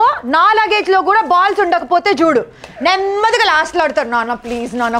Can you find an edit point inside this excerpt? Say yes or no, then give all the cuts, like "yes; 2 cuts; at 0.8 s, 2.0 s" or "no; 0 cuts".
no; 0 cuts